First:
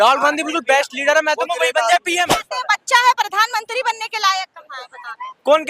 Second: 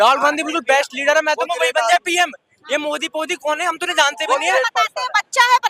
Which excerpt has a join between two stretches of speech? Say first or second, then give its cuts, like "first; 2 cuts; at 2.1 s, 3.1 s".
first; 1 cut; at 2.4 s